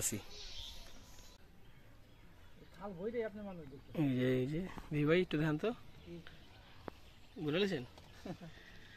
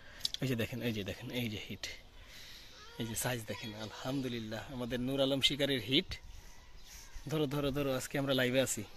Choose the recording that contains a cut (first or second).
first